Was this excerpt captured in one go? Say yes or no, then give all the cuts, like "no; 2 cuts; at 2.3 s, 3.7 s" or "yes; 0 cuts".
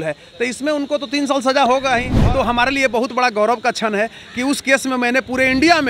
no; 1 cut; at 2.1 s